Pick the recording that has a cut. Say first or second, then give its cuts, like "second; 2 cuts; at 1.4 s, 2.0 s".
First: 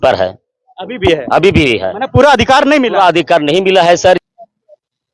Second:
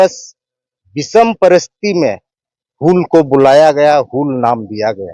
first; 1 cut; at 4.2 s